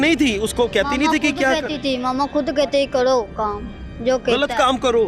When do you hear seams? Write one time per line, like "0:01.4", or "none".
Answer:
none